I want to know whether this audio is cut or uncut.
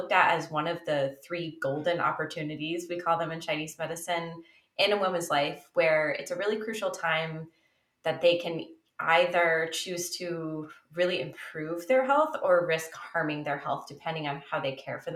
uncut